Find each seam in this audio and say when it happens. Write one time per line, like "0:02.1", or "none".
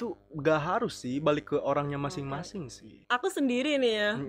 0:03.0